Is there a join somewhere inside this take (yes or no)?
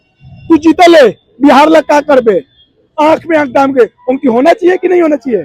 no